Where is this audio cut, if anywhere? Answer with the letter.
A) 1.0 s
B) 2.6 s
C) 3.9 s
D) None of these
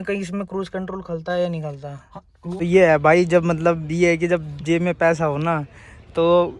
B